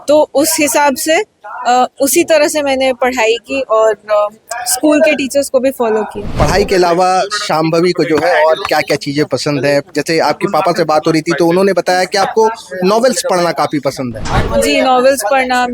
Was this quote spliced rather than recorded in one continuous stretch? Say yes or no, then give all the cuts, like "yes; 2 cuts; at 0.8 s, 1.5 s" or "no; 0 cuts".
yes; 1 cut; at 6.2 s